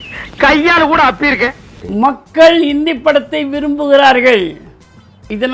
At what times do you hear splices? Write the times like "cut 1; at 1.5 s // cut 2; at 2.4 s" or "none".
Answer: cut 1; at 1.8 s